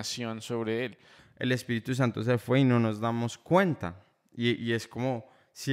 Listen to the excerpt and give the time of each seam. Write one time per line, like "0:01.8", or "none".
0:01.1